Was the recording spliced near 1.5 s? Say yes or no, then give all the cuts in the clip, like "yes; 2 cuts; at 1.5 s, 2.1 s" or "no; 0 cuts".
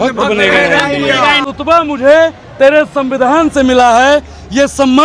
yes; 1 cut; at 1.5 s